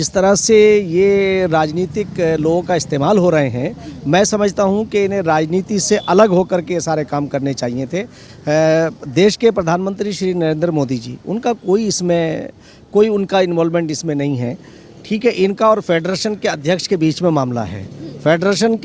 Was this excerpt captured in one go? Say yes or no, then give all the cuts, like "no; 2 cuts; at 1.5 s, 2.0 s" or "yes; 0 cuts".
yes; 0 cuts